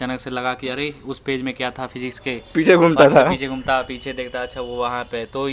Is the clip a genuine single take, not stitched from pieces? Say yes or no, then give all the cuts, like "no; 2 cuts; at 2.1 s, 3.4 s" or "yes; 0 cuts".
yes; 0 cuts